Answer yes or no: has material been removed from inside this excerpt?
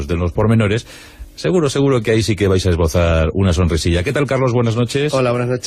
yes